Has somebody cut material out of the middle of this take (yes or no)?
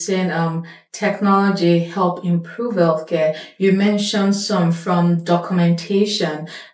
no